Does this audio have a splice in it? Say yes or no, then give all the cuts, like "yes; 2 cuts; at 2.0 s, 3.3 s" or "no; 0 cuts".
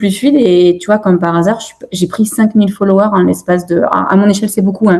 no; 0 cuts